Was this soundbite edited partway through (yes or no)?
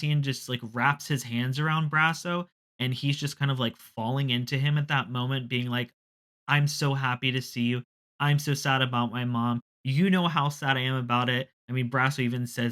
no